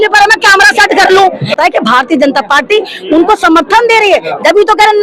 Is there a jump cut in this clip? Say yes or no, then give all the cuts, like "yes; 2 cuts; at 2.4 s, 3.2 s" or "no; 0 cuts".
yes; 1 cut; at 1.6 s